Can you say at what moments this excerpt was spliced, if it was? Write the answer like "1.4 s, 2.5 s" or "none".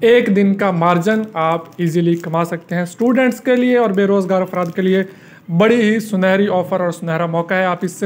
none